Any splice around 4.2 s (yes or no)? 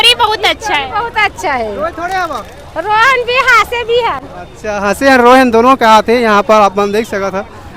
no